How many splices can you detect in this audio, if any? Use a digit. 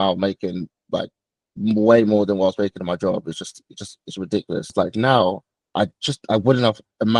1